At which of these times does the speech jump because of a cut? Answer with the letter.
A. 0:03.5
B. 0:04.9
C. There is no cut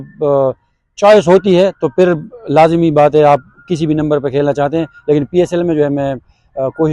C